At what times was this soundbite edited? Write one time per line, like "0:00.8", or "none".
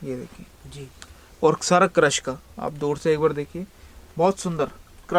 none